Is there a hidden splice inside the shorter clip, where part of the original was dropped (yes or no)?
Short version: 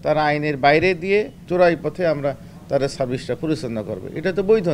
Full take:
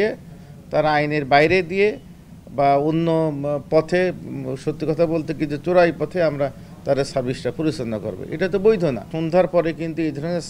yes